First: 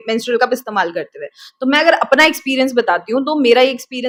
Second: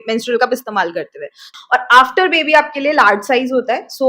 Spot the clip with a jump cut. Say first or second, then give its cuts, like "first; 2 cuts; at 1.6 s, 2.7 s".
second; 1 cut; at 1.5 s